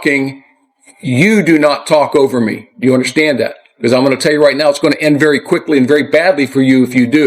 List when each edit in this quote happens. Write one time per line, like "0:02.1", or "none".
0:03.6